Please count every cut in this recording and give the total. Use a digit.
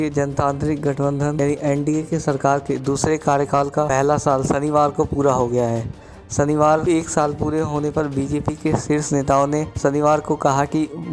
4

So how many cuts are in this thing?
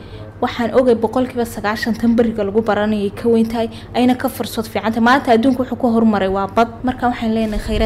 1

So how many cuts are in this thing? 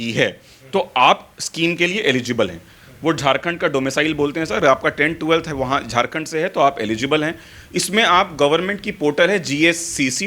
0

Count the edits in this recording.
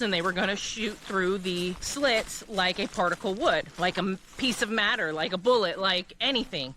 2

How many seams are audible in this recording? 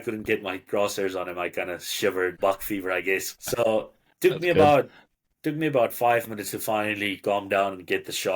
2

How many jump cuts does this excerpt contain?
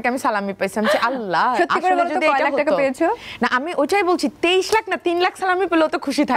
1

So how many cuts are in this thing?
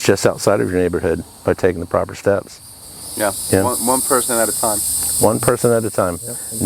0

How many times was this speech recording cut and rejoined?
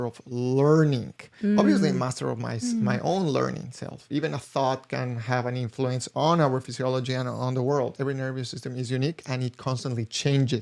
2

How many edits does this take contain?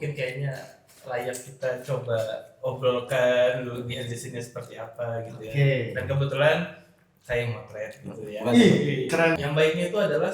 1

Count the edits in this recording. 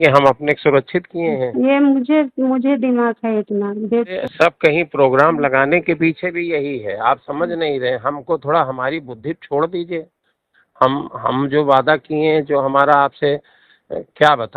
1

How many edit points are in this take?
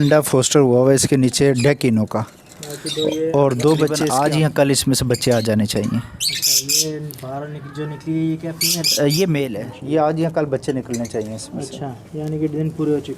2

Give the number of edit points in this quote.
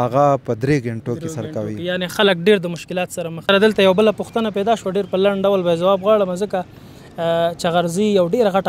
1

